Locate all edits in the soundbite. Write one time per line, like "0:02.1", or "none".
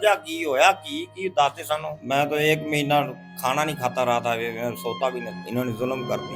0:01.9
0:05.4